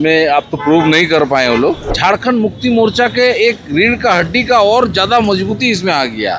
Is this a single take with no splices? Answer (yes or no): no